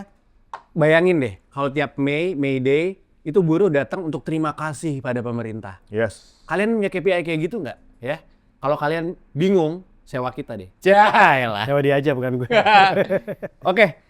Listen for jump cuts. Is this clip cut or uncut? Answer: uncut